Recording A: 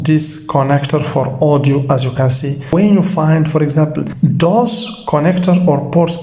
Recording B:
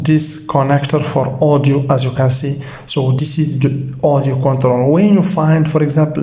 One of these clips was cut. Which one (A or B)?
A